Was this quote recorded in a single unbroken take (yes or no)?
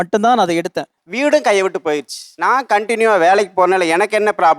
no